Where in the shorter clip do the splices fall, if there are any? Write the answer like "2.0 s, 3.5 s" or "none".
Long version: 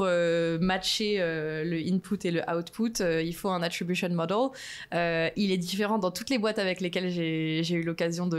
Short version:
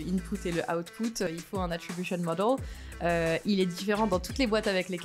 1.3 s